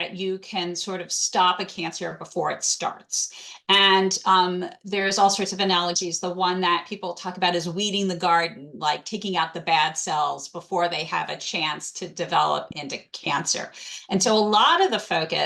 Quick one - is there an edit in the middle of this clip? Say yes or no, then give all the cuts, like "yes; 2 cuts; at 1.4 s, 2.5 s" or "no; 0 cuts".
no; 0 cuts